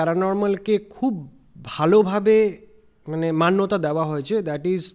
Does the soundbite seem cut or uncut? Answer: uncut